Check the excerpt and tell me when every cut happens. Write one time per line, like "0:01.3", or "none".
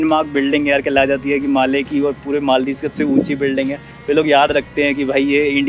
none